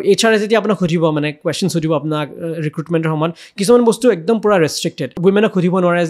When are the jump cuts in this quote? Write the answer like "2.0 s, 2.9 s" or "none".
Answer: 5.2 s